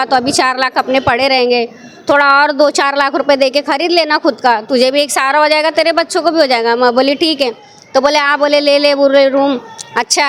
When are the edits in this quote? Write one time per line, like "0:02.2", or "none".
none